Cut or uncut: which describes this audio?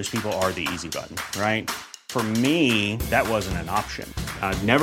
uncut